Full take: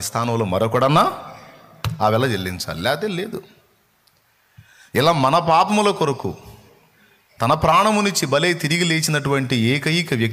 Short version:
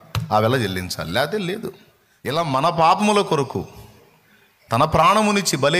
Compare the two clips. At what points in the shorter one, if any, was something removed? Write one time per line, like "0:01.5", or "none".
0:02.4

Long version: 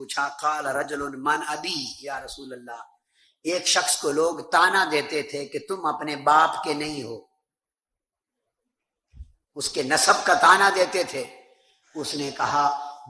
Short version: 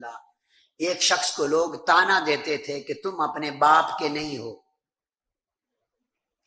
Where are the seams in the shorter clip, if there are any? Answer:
none

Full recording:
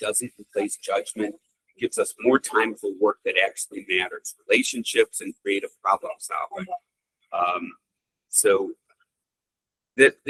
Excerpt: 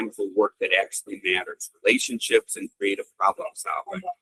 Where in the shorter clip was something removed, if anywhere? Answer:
none

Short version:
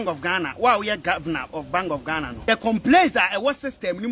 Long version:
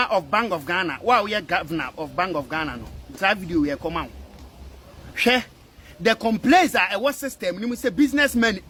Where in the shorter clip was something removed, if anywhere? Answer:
0:02.5

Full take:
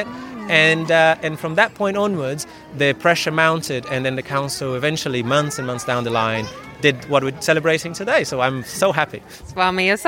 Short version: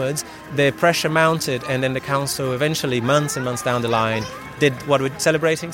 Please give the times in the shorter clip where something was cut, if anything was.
none

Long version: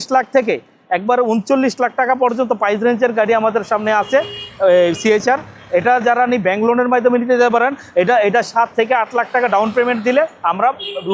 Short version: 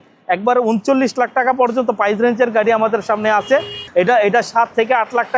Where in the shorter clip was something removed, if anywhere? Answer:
0:03.8

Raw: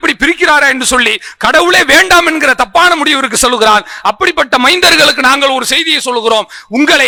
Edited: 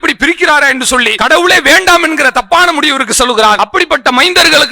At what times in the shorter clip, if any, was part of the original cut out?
0:01.1
0:03.6

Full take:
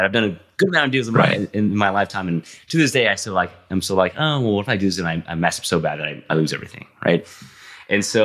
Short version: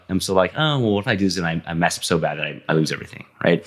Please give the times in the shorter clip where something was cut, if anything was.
none

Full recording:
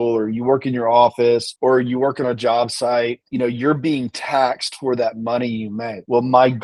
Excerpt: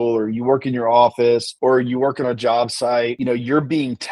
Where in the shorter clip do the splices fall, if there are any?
0:03.2

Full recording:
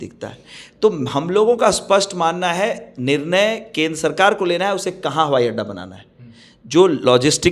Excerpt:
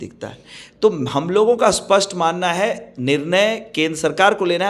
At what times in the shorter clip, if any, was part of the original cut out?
none

